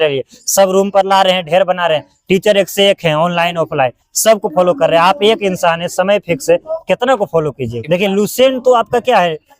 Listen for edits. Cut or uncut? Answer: cut